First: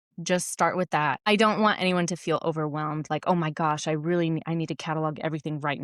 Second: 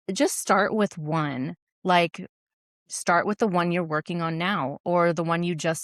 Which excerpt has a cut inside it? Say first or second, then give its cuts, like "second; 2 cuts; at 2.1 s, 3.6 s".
first; 1 cut; at 1.2 s